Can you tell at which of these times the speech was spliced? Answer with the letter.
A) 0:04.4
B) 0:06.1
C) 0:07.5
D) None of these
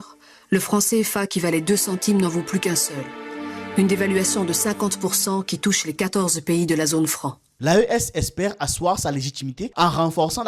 C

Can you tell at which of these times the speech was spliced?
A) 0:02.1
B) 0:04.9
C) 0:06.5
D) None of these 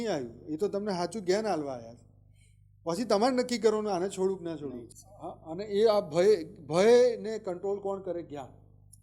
B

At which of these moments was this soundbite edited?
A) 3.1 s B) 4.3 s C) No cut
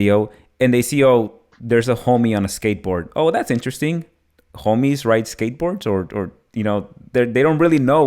C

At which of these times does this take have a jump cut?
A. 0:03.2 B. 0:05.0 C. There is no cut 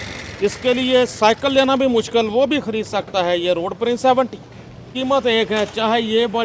B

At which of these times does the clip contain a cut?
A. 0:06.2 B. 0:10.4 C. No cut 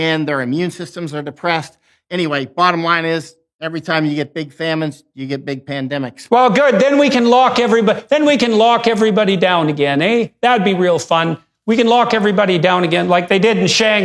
A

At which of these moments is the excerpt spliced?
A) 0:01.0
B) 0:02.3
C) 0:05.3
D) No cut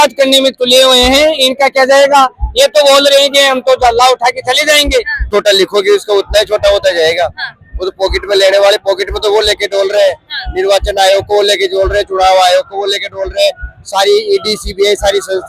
C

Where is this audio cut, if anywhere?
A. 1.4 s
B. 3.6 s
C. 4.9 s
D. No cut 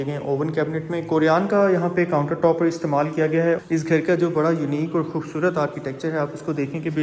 B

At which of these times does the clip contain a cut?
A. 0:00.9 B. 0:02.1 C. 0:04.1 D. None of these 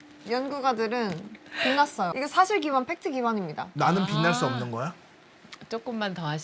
B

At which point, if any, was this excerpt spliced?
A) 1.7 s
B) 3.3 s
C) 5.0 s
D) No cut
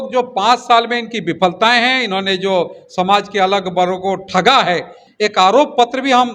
C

